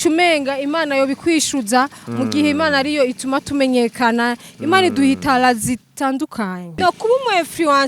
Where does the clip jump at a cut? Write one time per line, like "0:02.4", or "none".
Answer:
0:06.8